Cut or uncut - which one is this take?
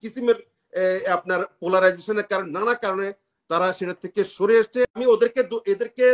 cut